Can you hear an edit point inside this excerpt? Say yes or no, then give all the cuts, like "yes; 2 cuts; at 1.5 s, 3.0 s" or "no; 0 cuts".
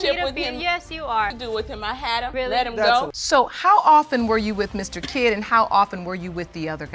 yes; 2 cuts; at 1.3 s, 3.1 s